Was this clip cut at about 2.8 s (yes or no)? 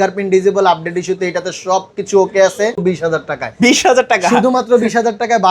yes